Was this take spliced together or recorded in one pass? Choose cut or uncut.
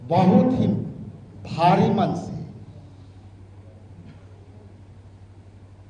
uncut